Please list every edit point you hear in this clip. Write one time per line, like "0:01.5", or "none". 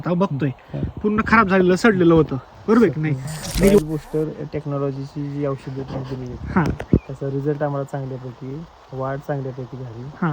0:03.8